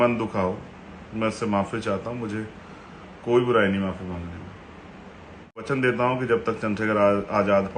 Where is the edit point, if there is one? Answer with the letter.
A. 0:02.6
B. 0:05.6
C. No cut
B